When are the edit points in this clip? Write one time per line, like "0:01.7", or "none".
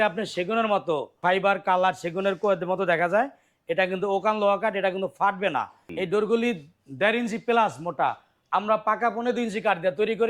0:01.2
0:05.8